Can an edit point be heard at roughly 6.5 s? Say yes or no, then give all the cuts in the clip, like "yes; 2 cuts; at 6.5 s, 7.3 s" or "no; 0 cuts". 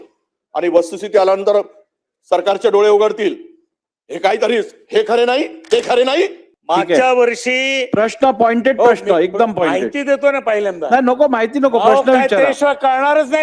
yes; 1 cut; at 6.5 s